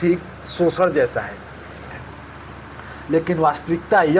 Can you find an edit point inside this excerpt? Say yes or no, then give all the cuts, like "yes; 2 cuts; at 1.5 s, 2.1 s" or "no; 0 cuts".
yes; 1 cut; at 1.8 s